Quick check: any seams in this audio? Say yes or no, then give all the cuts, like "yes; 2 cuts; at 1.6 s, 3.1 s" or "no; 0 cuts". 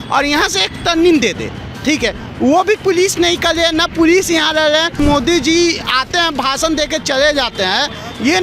yes; 1 cut; at 5.0 s